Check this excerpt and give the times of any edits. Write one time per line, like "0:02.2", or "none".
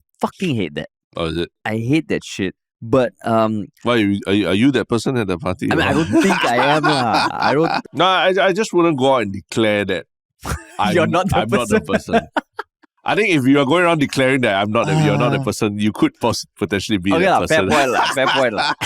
0:07.8